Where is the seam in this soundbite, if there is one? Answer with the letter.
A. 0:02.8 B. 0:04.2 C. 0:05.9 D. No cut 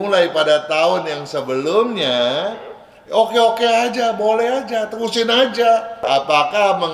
C